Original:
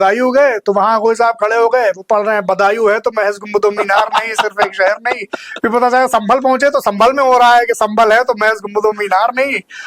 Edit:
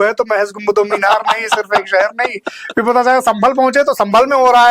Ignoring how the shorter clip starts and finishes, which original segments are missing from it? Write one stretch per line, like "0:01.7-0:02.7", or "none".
none